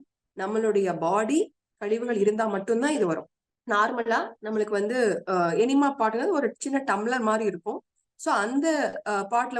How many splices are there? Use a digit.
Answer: 1